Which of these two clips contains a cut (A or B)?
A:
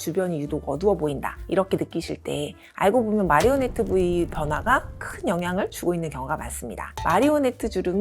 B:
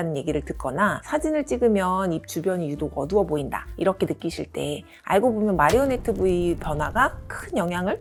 A